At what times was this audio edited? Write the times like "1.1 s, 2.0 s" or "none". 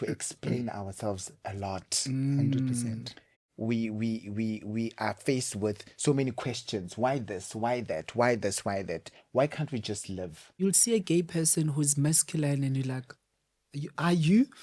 3.4 s, 10.6 s